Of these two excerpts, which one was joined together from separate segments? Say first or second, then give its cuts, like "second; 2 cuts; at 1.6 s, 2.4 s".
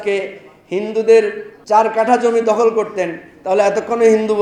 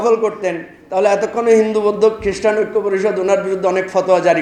first; 1 cut; at 1.5 s